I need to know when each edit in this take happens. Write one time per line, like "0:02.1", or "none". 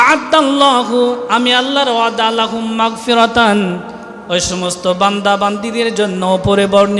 none